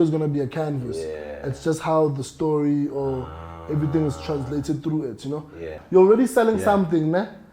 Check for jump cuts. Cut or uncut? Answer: cut